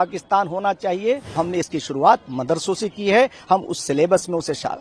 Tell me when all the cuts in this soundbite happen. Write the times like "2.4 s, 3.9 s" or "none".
1.3 s